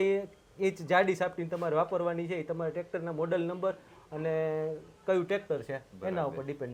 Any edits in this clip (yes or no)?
no